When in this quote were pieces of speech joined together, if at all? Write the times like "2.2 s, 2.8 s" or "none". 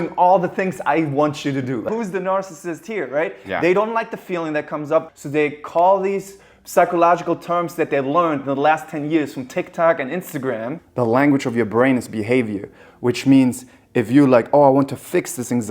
1.9 s, 5.1 s, 10.8 s